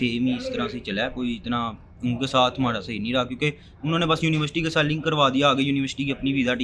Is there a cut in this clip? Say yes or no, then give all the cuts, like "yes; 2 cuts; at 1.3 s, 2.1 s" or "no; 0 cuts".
no; 0 cuts